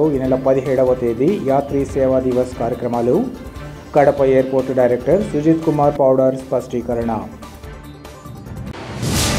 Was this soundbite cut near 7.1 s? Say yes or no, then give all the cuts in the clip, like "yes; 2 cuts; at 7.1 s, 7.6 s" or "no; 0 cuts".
no; 0 cuts